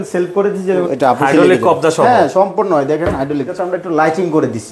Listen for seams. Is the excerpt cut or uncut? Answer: cut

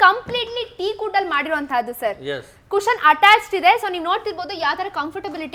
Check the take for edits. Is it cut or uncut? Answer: uncut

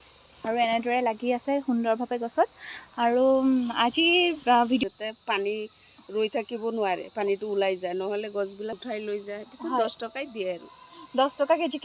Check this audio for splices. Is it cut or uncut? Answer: cut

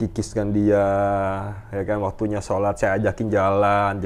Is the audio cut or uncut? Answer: uncut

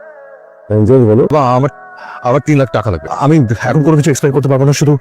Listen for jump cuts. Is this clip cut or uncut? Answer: cut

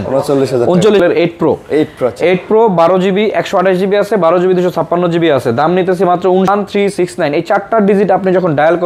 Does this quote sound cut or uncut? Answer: cut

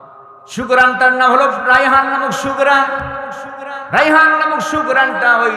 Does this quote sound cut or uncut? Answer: uncut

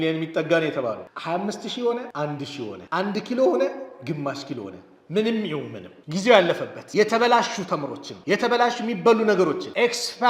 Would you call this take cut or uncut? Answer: cut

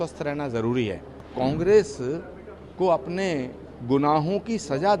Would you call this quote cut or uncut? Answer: cut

